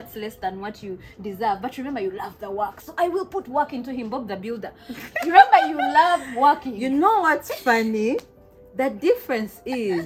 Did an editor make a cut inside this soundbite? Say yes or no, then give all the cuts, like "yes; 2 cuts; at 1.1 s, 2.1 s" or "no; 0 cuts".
no; 0 cuts